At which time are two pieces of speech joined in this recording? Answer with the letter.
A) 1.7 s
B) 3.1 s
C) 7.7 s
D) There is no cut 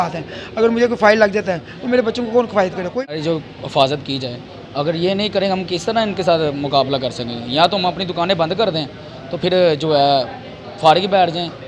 B